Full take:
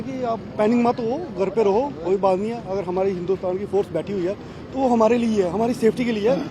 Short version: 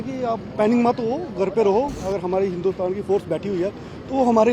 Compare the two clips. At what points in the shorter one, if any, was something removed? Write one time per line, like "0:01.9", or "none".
0:02.0